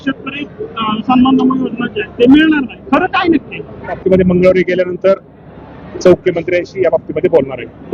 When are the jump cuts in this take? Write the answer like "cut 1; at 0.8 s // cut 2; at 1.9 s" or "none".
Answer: cut 1; at 4.0 s // cut 2; at 6.2 s